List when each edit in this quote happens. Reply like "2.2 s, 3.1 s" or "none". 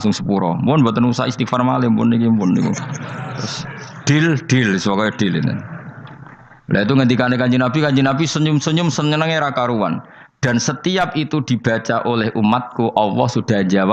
none